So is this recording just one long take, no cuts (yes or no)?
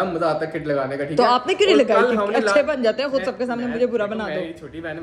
yes